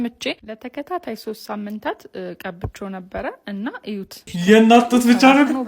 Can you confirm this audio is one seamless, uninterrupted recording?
no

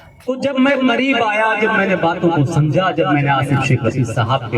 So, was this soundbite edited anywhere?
no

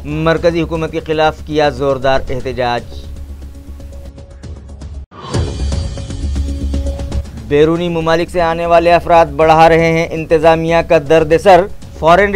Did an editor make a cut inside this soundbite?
yes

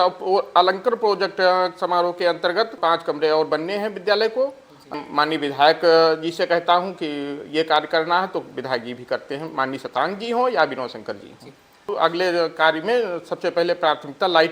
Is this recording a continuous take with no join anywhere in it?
no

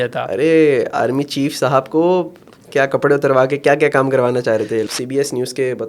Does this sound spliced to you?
yes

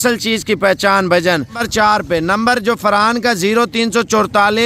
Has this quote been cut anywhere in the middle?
yes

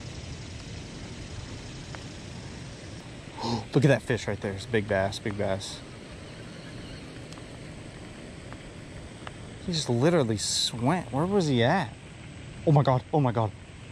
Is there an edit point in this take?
no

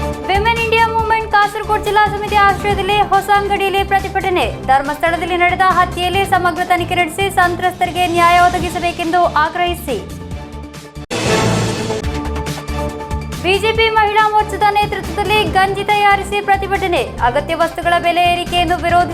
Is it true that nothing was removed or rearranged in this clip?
yes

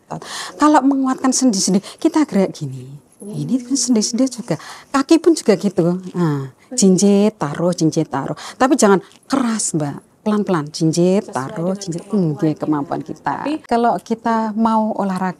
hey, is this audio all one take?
no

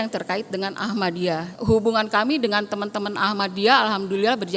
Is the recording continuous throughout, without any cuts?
no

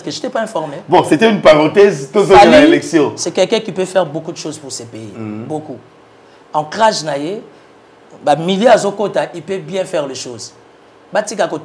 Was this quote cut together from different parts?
no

